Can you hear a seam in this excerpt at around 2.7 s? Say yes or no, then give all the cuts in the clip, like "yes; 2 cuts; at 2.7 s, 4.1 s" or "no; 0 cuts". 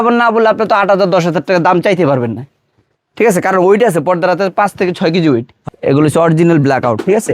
no; 1 cut; at 5.6 s